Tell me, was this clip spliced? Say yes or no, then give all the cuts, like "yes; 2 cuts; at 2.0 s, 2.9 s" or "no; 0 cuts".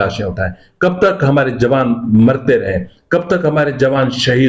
no; 0 cuts